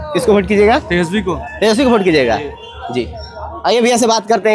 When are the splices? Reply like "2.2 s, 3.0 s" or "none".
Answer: none